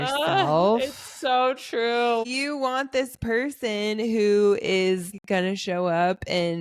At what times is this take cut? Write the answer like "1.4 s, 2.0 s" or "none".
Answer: 2.3 s, 5.1 s